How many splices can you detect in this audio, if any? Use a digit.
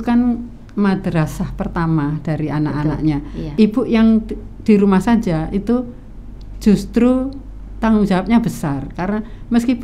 1